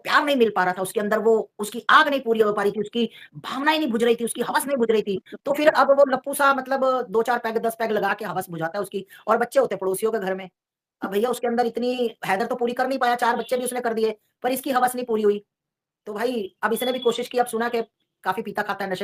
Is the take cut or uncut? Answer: uncut